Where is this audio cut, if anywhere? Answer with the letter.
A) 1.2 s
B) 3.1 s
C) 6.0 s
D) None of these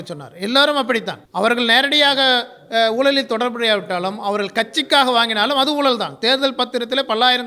A